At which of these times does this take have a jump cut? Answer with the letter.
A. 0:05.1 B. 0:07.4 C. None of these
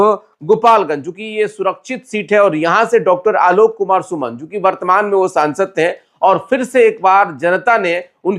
C